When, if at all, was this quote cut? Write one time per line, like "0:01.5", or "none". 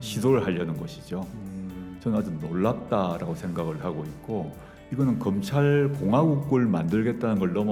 none